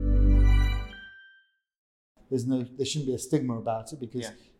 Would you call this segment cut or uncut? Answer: cut